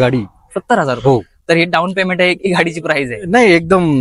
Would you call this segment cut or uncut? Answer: uncut